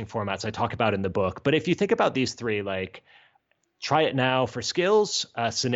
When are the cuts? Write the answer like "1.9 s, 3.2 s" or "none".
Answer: 3.3 s